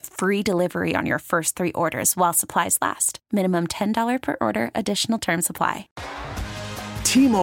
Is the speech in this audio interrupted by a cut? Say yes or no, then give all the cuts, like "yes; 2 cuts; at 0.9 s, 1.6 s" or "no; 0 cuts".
yes; 1 cut; at 5.9 s